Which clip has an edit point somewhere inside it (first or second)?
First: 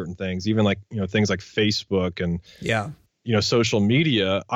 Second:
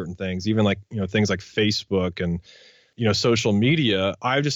second